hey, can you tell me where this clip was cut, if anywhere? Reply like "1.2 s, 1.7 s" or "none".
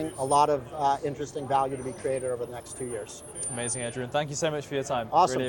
none